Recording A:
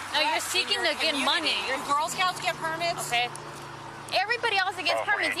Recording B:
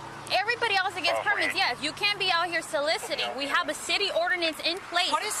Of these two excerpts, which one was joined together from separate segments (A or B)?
A